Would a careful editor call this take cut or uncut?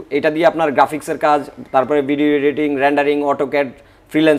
uncut